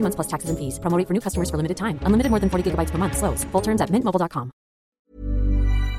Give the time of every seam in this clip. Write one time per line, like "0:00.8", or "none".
0:04.9